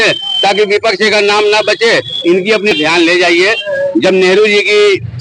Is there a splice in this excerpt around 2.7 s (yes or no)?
yes